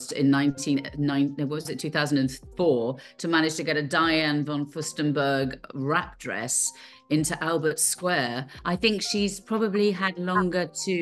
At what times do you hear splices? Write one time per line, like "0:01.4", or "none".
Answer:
0:08.5